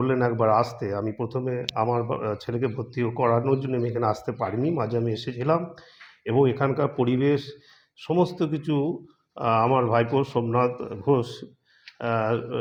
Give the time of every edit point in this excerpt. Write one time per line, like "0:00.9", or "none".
none